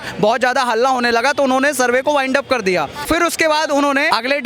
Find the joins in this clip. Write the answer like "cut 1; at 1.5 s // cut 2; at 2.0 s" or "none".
none